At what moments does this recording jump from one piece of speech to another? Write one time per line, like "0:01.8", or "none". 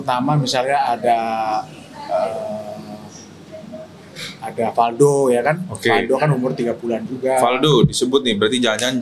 none